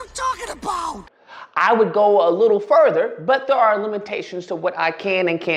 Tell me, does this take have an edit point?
yes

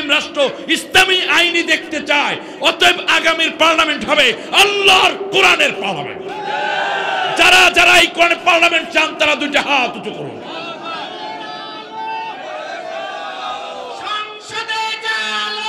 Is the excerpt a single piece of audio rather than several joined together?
yes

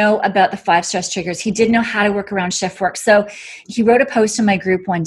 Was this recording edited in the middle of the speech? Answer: yes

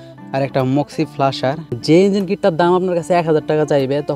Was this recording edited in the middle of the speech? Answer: yes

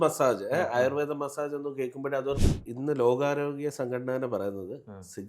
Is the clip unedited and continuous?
no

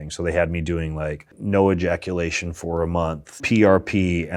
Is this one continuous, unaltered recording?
no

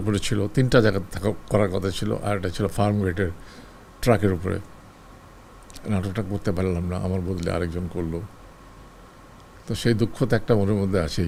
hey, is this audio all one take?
yes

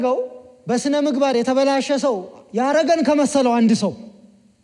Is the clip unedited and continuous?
yes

